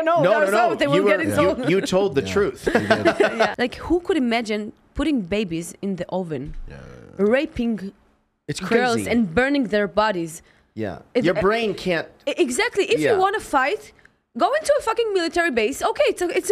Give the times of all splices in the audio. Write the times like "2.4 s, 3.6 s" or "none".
3.5 s